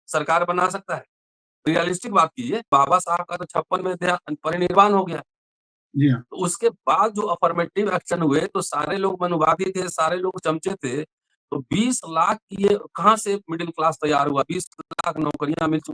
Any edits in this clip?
yes; 1 cut; at 2.7 s

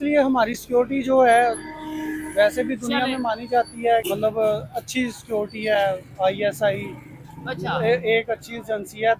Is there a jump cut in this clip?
yes; 1 cut; at 4.0 s

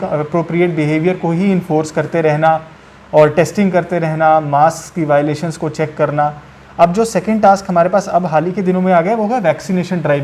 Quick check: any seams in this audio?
no; 0 cuts

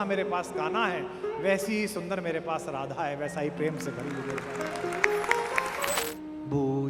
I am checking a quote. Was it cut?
yes; 1 cut; at 6.0 s

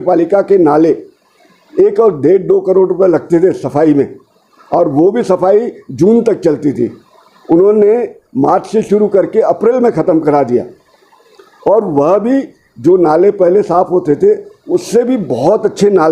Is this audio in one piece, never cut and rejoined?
yes; 0 cuts

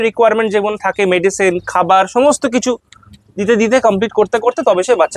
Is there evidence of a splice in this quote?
no; 0 cuts

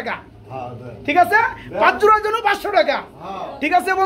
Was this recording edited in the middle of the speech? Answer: no; 0 cuts

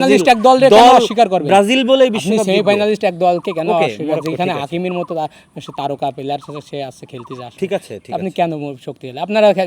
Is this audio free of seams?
yes; 0 cuts

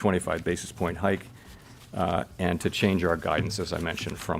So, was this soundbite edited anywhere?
no; 0 cuts

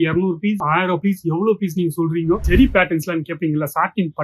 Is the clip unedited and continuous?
no; 1 cut; at 2.4 s

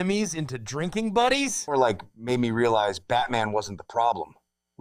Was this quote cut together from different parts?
yes; 1 cut; at 1.6 s

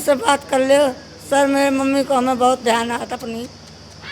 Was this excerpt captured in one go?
yes; 0 cuts

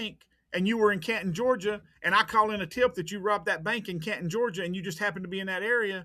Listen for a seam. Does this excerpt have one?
no; 0 cuts

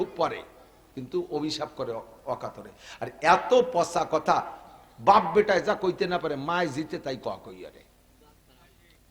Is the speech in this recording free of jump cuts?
yes; 0 cuts

